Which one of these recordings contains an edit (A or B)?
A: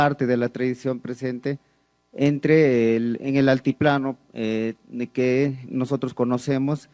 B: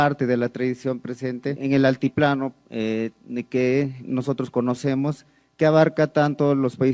B